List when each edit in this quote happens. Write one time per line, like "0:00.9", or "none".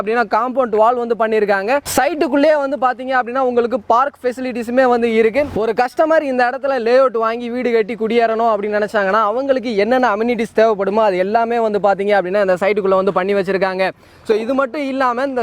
none